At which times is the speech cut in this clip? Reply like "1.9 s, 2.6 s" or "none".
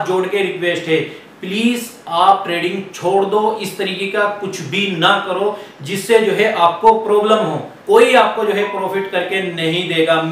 none